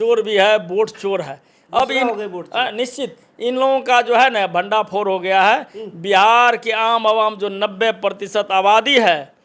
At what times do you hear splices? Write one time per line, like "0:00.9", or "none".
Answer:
none